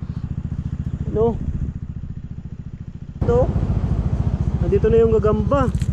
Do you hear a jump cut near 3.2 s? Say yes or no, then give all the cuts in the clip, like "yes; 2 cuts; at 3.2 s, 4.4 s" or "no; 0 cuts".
yes; 1 cut; at 3.2 s